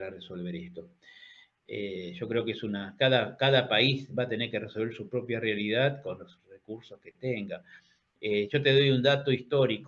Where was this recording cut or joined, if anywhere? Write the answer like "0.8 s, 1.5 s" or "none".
none